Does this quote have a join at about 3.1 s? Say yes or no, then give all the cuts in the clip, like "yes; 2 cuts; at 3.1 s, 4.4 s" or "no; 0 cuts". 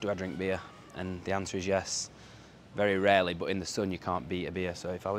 no; 0 cuts